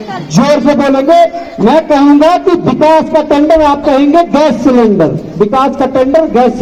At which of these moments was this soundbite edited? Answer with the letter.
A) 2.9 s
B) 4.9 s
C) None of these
C